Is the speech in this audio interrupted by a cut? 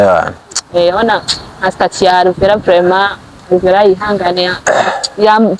no; 0 cuts

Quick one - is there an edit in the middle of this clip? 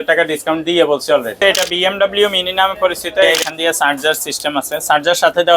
yes; 2 cuts; at 1.4 s, 3.3 s

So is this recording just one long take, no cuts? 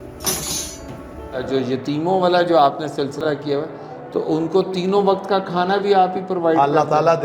no; 1 cut; at 1.4 s

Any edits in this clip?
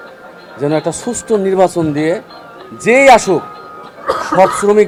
no; 0 cuts

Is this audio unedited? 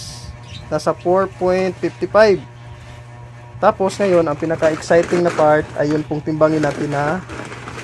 yes; 0 cuts

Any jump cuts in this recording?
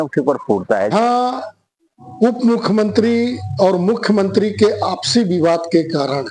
yes; 1 cut; at 0.9 s

